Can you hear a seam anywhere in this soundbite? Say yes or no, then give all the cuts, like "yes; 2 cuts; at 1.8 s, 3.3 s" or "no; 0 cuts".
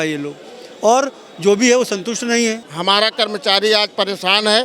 yes; 1 cut; at 2.7 s